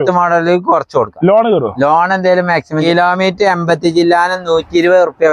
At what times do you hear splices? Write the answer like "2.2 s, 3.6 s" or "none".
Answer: 2.8 s